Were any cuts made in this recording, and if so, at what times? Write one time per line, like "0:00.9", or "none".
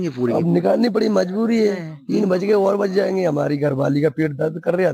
0:01.9